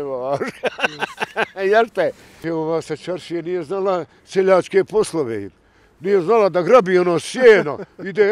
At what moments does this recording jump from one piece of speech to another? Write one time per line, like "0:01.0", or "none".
0:02.3